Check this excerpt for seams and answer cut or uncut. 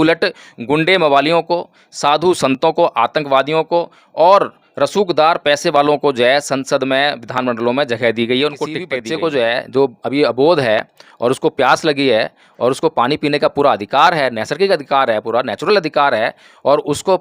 cut